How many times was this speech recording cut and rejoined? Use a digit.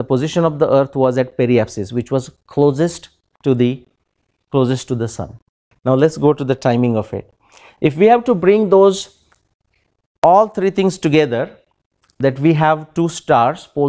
1